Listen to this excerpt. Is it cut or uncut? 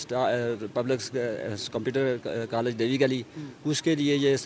uncut